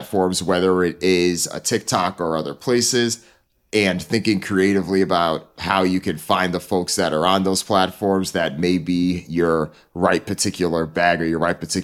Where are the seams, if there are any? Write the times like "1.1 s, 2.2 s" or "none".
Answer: none